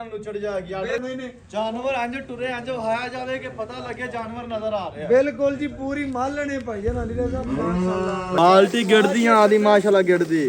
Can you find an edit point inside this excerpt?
yes; 2 cuts; at 1.0 s, 8.4 s

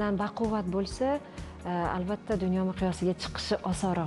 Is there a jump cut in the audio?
no; 0 cuts

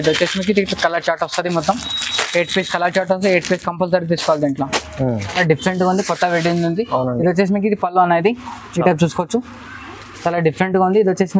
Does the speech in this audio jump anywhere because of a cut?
yes; 1 cut; at 5.3 s

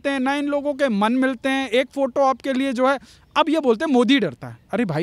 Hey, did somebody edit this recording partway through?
no; 0 cuts

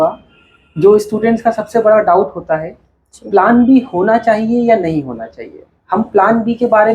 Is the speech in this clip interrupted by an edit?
no; 0 cuts

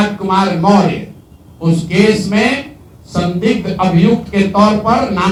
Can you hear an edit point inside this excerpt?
no; 0 cuts

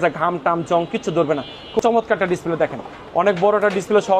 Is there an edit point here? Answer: yes; 1 cut; at 1.8 s

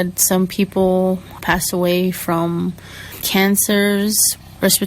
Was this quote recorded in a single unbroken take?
no; 1 cut; at 3.1 s

